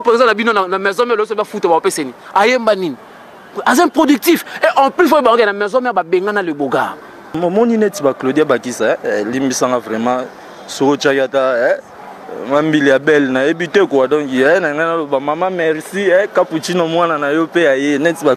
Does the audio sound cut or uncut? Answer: cut